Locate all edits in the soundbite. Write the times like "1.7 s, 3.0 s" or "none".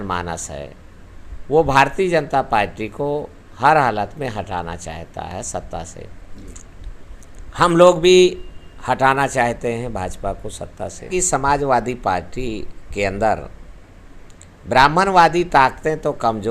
11.1 s